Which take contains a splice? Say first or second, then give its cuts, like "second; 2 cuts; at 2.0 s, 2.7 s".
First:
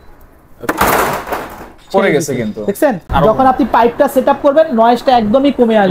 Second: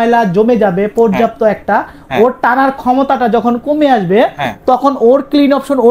first; 1 cut; at 3.0 s